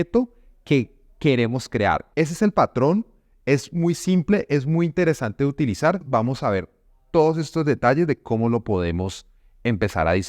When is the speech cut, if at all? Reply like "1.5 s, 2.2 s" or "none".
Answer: 2.0 s, 6.1 s